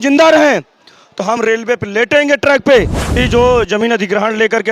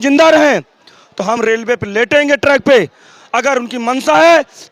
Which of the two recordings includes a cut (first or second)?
first